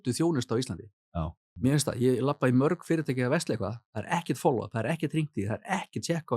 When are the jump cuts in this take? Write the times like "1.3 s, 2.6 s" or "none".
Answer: 1.4 s